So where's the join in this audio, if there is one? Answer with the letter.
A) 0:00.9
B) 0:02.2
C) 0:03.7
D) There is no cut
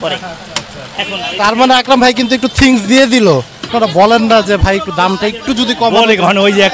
C